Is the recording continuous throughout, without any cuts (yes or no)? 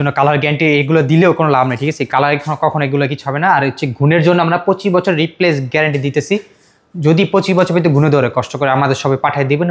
yes